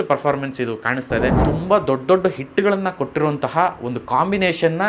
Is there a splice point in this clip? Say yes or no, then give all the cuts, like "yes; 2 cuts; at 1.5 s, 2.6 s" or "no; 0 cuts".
yes; 1 cut; at 1.4 s